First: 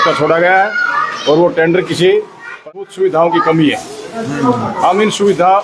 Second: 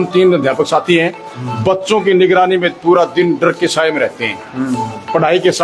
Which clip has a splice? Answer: first; 1 cut; at 2.7 s

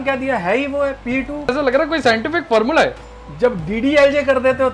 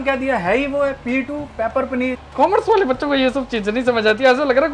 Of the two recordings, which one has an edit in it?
first; 2 cuts; at 1.5 s, 3.0 s

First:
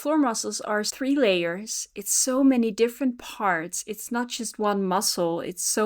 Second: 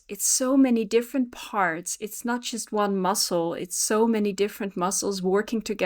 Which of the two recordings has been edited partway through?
first; 1 cut; at 0.9 s

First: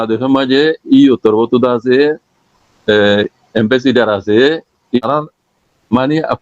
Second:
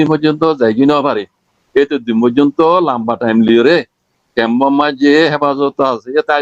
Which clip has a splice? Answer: first; 1 cut; at 5.0 s

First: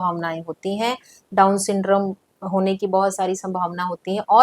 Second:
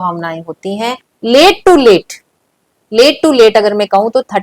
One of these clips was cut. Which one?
second; 1 cut; at 1.1 s

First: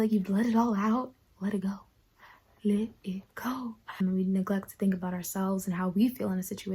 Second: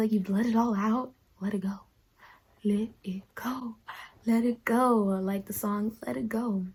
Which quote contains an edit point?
first; 1 cut; at 4.0 s

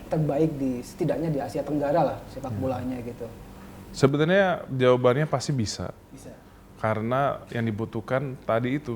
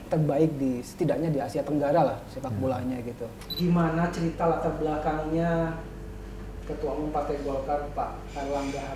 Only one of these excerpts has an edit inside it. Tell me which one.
second; 1 cut; at 3.4 s

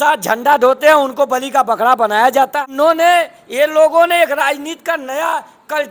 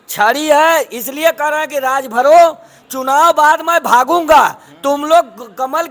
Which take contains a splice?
first; 1 cut; at 2.5 s

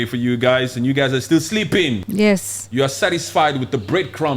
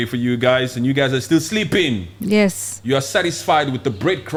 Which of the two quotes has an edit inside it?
first; 1 cut; at 2.0 s

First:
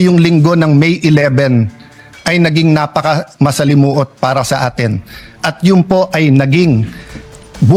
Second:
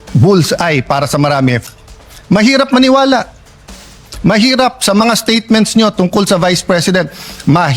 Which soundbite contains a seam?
second; 1 cut; at 1.6 s

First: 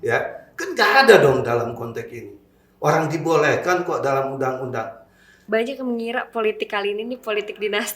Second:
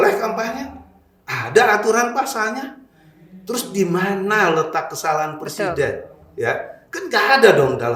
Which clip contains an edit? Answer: first; 1 cut; at 5.4 s

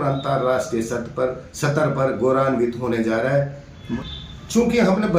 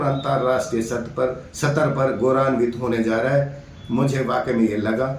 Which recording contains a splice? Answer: first; 1 cut; at 3.9 s

